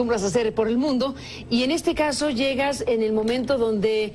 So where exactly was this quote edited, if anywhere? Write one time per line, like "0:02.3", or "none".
0:01.8